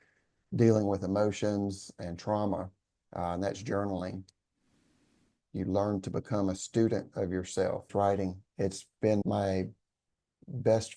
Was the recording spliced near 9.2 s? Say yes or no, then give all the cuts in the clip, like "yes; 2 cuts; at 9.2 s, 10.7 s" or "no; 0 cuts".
yes; 2 cuts; at 7.9 s, 9.2 s